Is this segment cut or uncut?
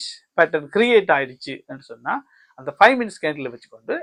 uncut